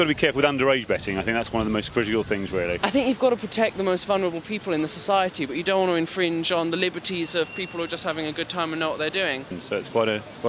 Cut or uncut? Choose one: cut